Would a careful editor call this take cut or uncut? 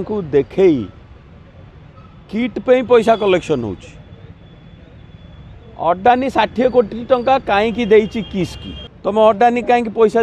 cut